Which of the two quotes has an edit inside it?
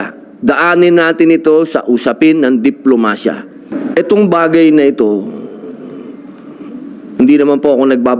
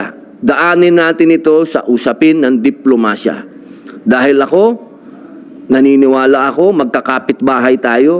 first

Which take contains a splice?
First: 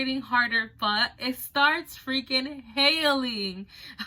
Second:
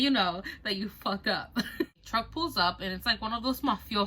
second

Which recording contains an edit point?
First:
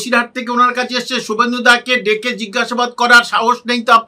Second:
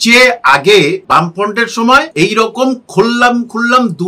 second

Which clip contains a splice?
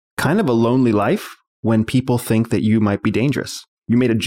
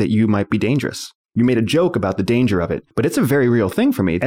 second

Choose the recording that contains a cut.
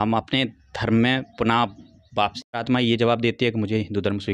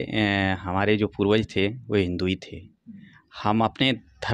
first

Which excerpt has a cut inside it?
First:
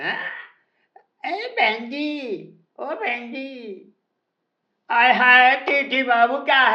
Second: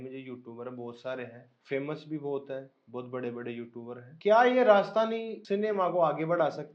second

